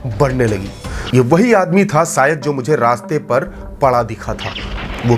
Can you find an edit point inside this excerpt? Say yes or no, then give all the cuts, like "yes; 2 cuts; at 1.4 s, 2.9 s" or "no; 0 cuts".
yes; 1 cut; at 0.9 s